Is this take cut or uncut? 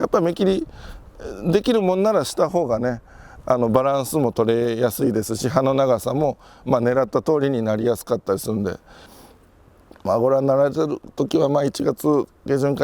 cut